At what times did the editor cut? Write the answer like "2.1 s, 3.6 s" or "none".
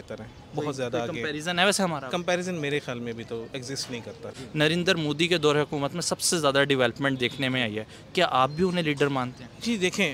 4.4 s